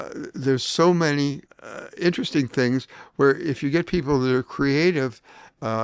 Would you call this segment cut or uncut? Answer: uncut